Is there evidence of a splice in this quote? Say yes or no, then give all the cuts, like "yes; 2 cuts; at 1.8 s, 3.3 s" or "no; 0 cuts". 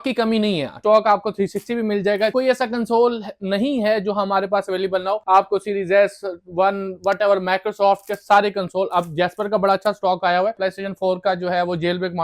yes; 4 cuts; at 0.8 s, 2.3 s, 5.2 s, 10.6 s